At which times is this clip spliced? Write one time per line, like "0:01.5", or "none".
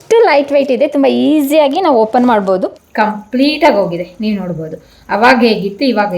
0:02.8